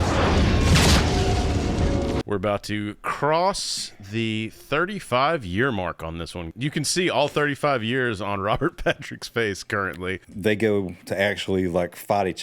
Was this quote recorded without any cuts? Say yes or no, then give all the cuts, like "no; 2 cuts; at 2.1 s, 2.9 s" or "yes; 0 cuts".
no; 3 cuts; at 2.2 s, 6.5 s, 10.2 s